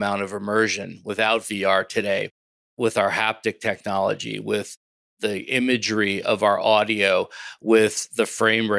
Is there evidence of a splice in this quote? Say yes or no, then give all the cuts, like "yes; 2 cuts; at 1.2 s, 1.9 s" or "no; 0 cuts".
no; 0 cuts